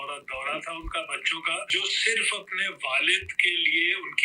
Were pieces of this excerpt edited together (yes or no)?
yes